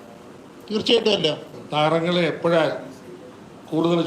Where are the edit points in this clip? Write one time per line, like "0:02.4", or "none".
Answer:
0:01.6